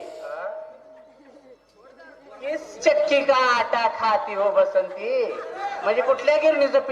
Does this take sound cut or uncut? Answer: uncut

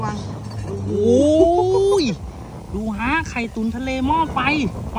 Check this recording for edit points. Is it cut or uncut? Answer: uncut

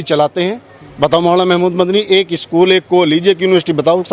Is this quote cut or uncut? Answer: uncut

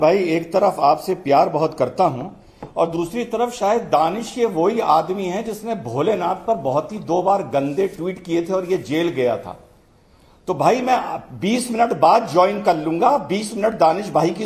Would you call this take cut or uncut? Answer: uncut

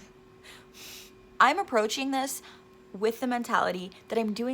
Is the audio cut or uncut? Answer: cut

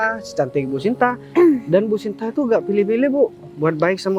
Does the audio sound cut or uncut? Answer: uncut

